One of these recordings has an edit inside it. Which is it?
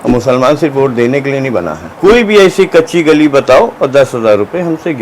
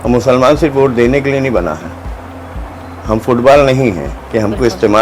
first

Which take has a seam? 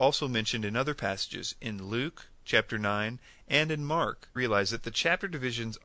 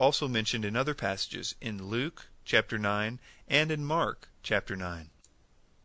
second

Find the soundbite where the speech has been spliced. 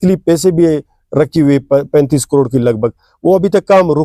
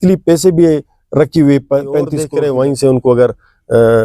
second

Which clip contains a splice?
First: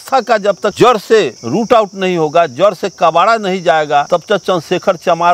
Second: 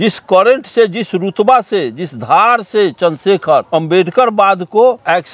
first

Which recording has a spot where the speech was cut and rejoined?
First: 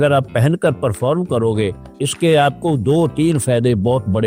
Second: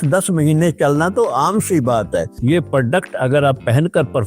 second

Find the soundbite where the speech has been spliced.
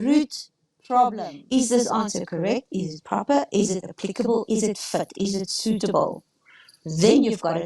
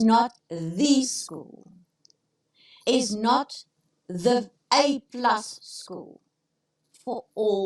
first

